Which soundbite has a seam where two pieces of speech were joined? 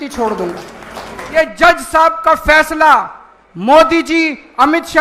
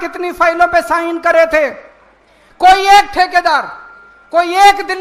first; 1 cut; at 1.2 s

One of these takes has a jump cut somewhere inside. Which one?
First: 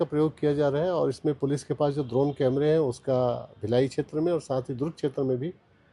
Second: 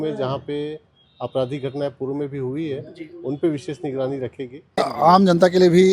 second; 1 cut; at 4.8 s

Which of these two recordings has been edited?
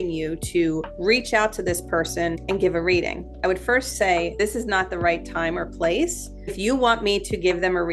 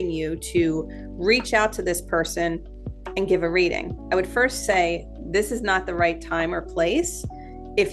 first; 4 cuts; at 0.9 s, 2.4 s, 4.3 s, 6.6 s

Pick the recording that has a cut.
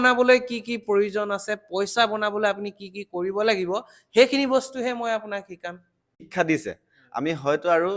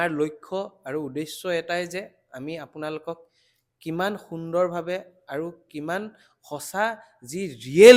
first; 1 cut; at 6.2 s

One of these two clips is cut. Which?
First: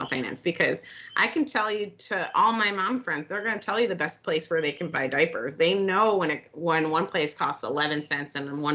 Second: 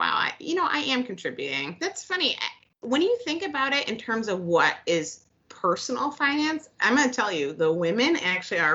second; 1 cut; at 1.7 s

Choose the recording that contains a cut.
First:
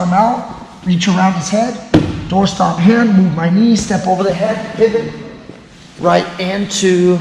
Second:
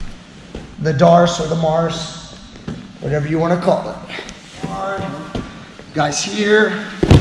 second; 1 cut; at 4.8 s

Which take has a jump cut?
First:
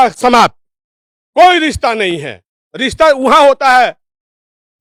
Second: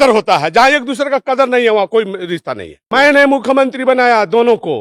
second; 1 cut; at 2.9 s

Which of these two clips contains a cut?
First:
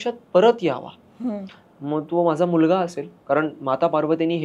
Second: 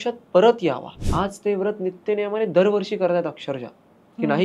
second; 1 cut; at 1.0 s

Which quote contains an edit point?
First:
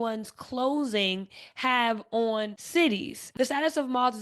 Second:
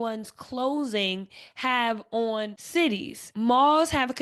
first; 1 cut; at 3.2 s

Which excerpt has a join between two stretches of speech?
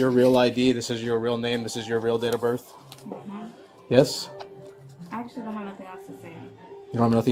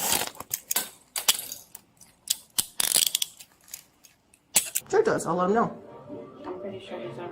second; 1 cut; at 4.8 s

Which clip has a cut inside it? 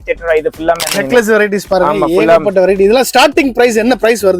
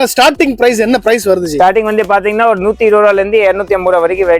first; 1 cut; at 1.0 s

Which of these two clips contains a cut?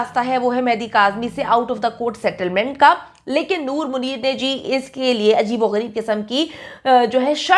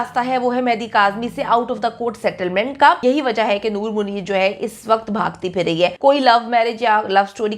second; 2 cuts; at 3.0 s, 6.0 s

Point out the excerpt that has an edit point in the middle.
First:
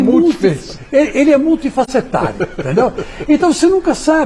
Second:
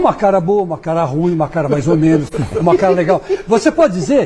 first; 1 cut; at 2.3 s

